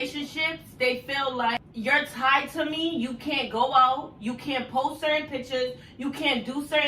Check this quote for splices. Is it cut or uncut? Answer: cut